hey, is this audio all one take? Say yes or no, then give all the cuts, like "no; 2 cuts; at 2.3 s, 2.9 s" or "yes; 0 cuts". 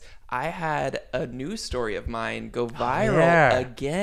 yes; 0 cuts